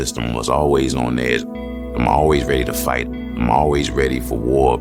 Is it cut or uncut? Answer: uncut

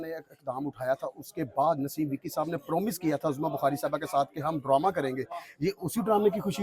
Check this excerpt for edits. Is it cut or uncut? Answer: uncut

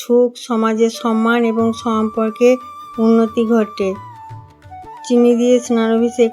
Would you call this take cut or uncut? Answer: uncut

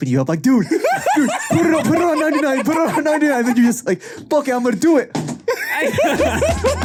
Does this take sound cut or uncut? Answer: uncut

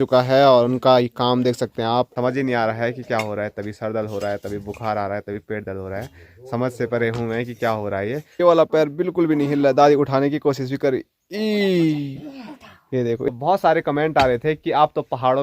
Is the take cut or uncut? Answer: cut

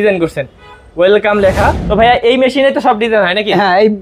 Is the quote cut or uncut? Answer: cut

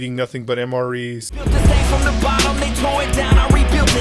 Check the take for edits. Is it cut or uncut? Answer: cut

